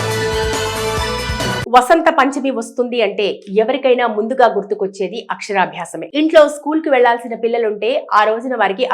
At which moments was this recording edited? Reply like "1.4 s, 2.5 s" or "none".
0.9 s